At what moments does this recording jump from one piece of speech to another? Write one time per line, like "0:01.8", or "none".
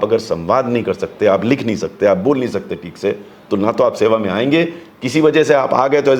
none